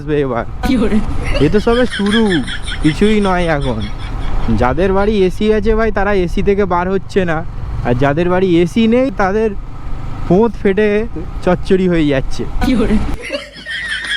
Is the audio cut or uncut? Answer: cut